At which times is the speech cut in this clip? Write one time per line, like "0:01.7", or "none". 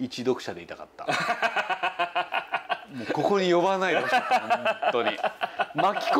none